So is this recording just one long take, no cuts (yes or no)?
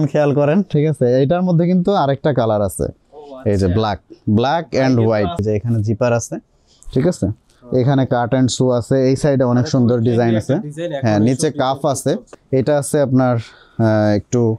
no